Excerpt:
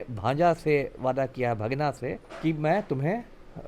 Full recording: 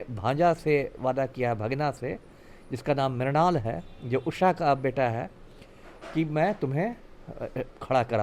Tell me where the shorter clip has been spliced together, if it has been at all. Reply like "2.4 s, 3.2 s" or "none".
2.3 s